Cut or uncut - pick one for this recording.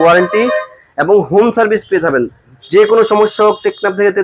uncut